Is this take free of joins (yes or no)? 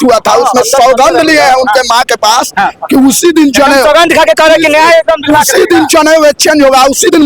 yes